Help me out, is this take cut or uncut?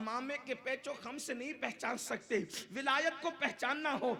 cut